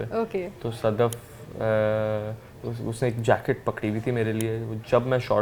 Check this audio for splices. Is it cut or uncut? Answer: uncut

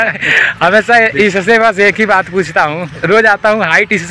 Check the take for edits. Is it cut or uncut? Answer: uncut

